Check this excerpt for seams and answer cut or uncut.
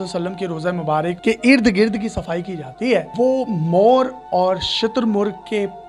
cut